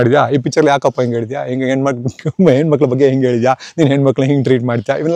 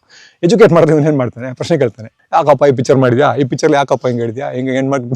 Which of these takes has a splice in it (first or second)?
second